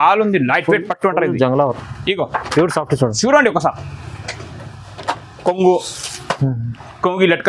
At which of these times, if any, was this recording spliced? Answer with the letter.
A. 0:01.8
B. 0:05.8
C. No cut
A